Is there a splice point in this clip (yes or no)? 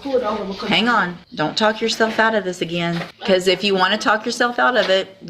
yes